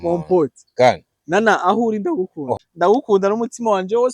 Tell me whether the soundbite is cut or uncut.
cut